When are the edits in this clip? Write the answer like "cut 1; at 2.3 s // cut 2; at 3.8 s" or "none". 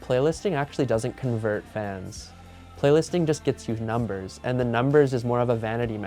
none